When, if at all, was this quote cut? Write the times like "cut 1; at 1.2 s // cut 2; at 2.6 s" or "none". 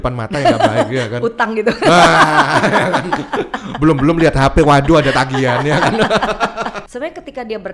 cut 1; at 6.8 s